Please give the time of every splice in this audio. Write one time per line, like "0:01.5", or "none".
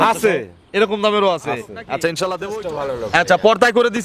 0:02.5